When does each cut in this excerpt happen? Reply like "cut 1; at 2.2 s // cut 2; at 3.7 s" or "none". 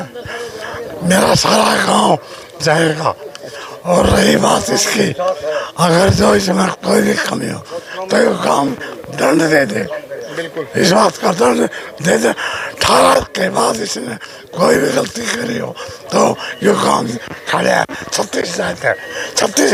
none